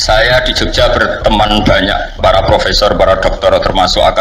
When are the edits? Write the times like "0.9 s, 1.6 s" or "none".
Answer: none